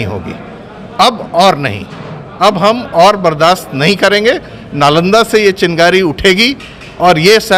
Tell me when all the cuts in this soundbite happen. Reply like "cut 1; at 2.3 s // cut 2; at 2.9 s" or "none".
none